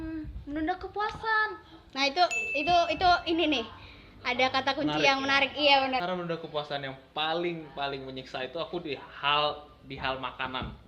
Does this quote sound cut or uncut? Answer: cut